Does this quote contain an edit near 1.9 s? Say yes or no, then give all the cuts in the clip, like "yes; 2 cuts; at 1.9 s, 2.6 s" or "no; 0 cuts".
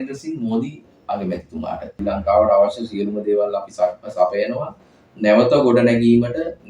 yes; 1 cut; at 1.9 s